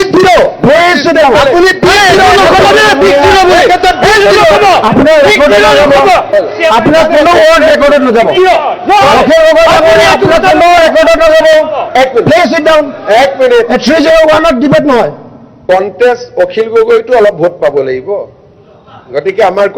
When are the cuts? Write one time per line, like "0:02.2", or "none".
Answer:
none